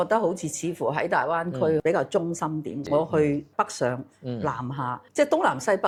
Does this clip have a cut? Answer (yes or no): no